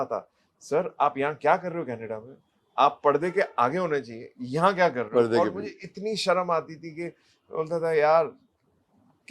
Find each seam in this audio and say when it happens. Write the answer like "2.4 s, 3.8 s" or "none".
none

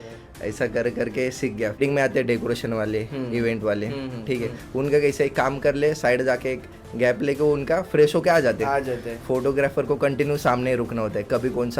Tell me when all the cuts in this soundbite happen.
1.8 s

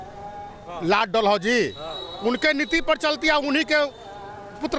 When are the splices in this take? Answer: none

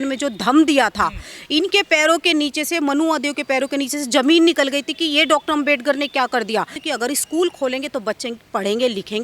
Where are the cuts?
6.8 s

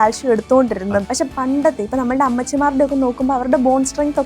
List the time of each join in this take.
1.0 s

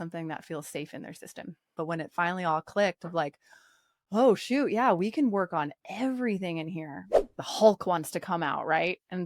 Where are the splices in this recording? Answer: 1.7 s, 7.4 s

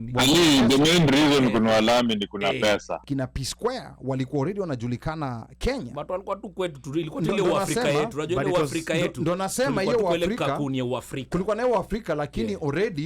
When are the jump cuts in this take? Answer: 3.0 s

